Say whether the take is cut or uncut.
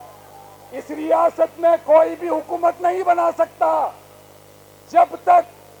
uncut